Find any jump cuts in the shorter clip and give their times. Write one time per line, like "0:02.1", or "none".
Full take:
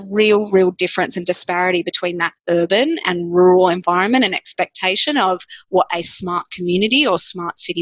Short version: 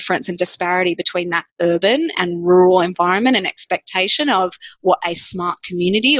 none